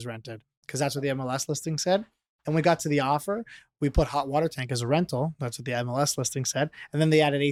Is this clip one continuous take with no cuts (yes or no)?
yes